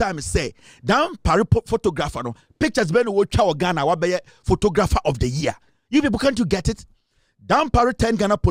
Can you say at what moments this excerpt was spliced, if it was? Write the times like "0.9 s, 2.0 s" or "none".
none